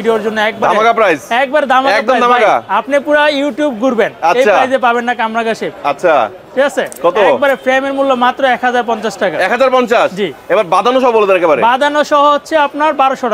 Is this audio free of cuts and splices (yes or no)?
yes